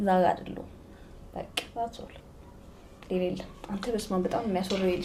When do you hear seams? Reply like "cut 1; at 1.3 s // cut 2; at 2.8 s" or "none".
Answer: none